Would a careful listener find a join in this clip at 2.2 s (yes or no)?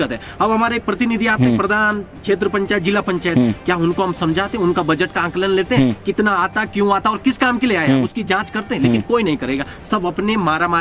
no